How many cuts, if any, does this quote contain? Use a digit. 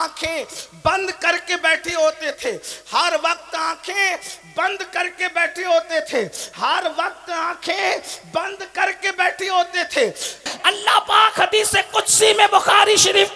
1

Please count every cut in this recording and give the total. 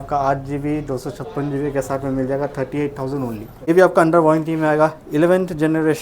1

